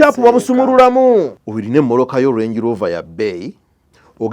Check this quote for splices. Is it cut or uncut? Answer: cut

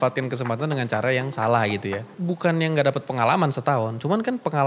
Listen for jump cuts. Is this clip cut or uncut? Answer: cut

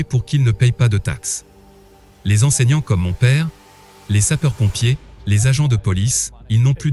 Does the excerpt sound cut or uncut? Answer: cut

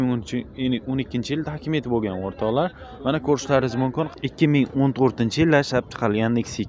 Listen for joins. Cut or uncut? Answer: cut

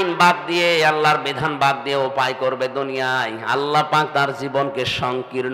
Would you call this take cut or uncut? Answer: uncut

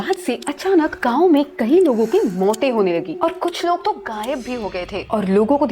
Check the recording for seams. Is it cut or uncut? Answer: uncut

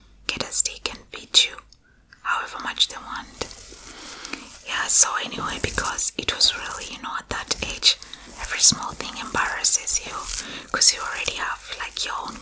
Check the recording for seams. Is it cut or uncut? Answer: uncut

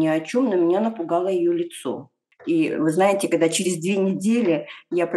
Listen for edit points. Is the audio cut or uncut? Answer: cut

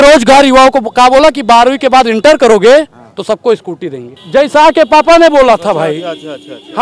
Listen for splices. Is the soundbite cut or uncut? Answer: cut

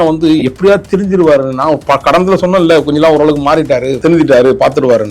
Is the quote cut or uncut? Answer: cut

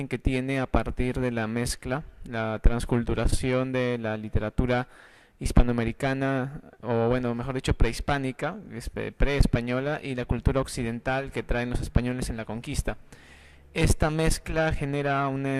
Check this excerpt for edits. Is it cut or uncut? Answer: cut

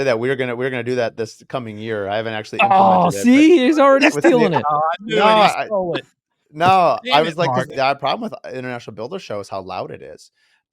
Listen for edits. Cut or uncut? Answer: cut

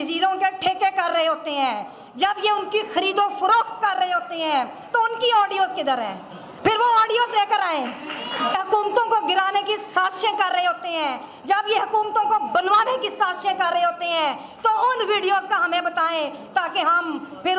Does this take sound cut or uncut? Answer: cut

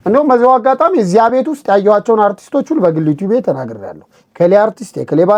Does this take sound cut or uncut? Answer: uncut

